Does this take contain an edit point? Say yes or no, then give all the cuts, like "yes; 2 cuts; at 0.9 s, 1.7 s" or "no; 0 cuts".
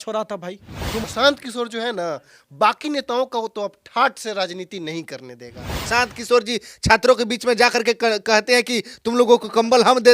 yes; 2 cuts; at 1.0 s, 5.9 s